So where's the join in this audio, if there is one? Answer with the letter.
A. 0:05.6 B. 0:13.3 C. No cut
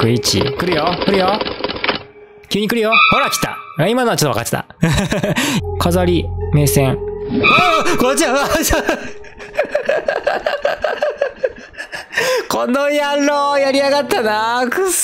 A